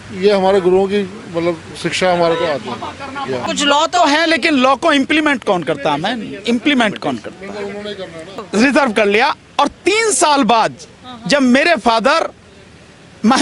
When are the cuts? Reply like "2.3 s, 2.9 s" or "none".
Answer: 3.4 s, 8.4 s